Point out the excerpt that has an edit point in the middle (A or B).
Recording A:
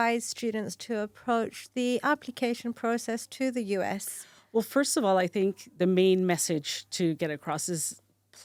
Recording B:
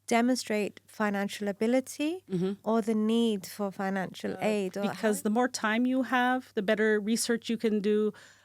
B